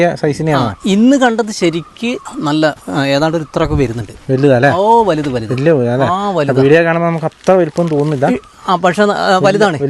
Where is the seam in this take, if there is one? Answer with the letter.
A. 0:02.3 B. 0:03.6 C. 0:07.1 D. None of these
A